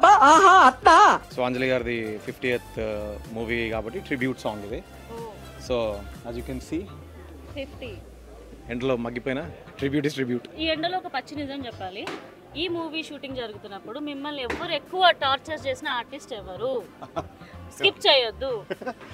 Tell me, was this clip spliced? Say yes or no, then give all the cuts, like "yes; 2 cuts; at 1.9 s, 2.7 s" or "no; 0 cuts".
no; 0 cuts